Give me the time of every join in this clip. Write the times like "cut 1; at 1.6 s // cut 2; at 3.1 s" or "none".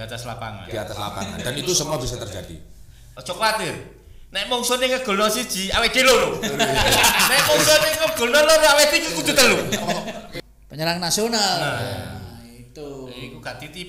cut 1; at 3.1 s // cut 2; at 10.3 s